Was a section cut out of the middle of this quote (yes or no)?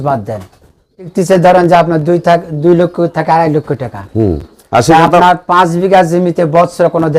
yes